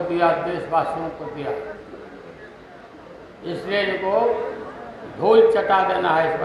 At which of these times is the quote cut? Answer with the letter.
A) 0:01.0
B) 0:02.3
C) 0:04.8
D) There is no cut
D